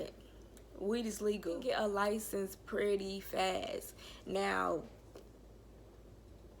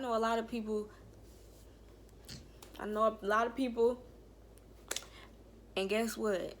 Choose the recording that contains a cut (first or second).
first